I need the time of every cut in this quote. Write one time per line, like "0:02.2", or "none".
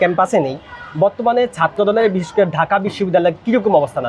none